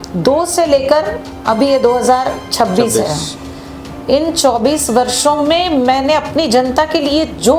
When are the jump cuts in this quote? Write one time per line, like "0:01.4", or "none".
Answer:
none